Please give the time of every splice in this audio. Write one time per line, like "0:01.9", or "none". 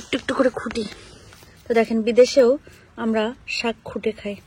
none